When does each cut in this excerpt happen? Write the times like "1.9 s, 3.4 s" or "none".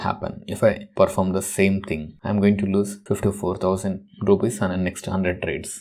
none